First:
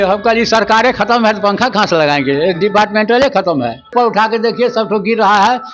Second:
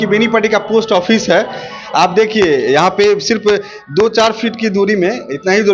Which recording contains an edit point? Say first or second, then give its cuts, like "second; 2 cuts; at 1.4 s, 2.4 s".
first; 1 cut; at 3.9 s